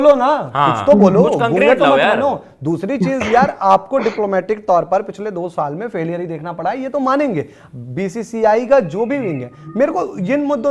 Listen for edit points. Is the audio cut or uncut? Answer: uncut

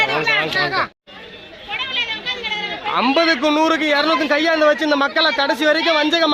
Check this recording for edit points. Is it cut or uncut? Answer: cut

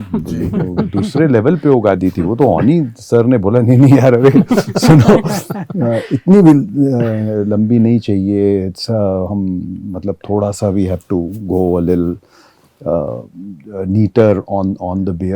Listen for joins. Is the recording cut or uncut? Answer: uncut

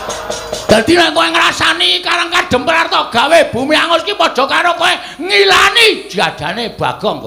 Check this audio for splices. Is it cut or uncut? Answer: uncut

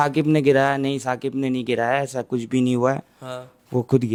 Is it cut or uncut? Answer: uncut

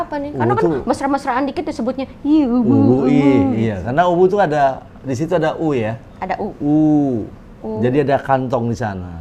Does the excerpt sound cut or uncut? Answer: uncut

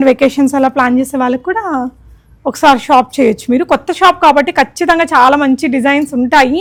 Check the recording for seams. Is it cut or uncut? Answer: uncut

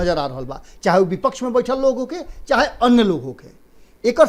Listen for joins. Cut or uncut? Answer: uncut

